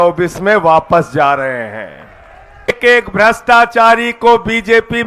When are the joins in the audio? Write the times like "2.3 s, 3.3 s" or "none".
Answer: 2.7 s